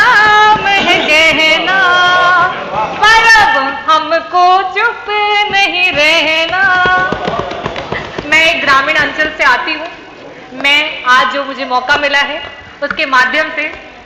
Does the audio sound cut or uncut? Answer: uncut